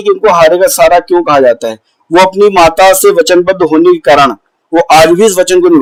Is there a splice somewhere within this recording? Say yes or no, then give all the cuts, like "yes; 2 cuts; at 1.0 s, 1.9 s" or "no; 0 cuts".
no; 0 cuts